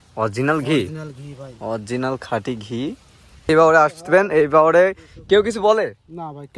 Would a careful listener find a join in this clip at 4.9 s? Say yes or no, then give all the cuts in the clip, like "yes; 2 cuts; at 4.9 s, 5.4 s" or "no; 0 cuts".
no; 1 cut; at 3.5 s